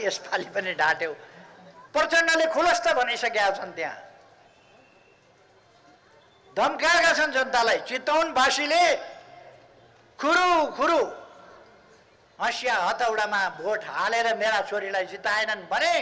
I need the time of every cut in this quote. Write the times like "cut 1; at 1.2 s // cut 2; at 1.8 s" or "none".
none

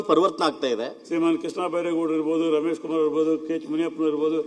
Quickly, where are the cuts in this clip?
cut 1; at 1.0 s

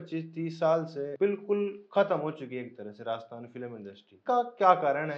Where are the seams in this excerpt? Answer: cut 1; at 1.1 s // cut 2; at 4.2 s

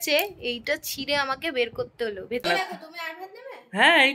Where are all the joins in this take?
cut 1; at 2.4 s

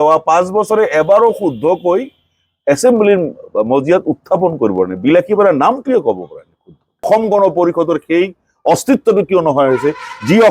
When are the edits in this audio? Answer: cut 1; at 7.1 s

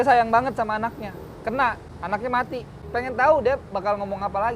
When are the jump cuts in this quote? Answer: cut 1; at 1.9 s // cut 2; at 2.8 s

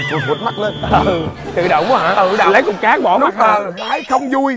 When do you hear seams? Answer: none

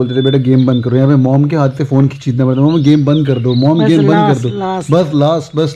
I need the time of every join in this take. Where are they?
none

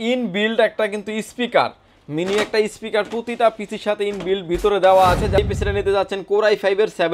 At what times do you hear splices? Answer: cut 1; at 5.4 s

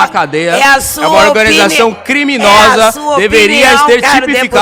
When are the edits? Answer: none

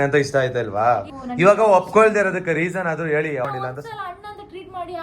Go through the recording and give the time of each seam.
cut 1; at 1.1 s // cut 2; at 3.5 s

